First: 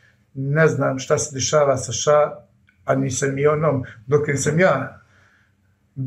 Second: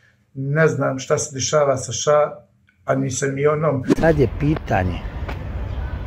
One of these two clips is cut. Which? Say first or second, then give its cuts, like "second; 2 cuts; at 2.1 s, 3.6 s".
second; 1 cut; at 3.9 s